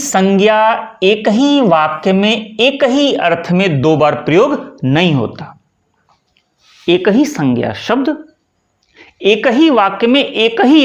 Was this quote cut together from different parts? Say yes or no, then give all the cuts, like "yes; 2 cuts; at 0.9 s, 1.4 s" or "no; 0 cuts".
no; 0 cuts